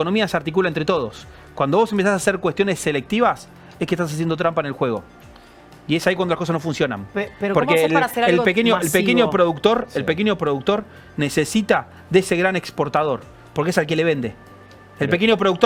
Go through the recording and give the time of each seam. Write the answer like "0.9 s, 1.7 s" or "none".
none